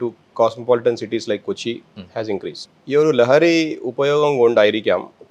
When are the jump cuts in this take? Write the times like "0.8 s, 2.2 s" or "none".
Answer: 2.7 s

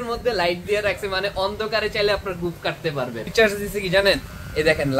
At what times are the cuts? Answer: 3.2 s

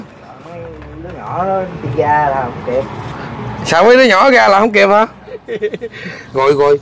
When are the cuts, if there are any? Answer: 5.5 s

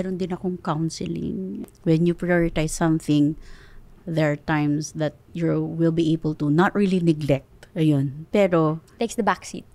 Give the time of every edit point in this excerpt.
1.6 s

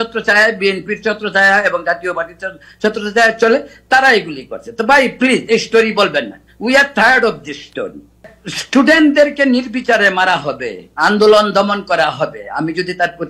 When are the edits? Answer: 8.2 s

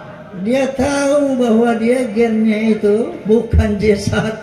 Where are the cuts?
3.2 s

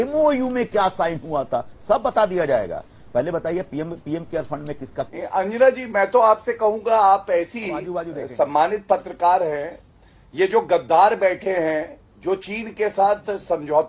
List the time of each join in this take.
5.1 s

